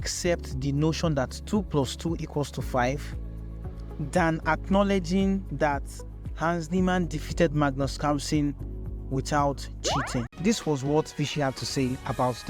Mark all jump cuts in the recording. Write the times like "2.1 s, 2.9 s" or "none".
10.2 s